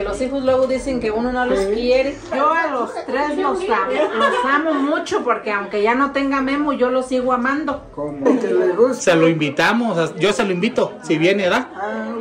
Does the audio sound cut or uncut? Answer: cut